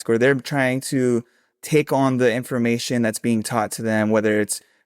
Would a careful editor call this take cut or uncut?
uncut